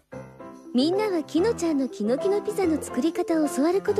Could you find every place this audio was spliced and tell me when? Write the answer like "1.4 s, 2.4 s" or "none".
none